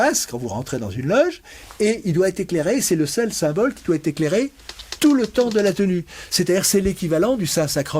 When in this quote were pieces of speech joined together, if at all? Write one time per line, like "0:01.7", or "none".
none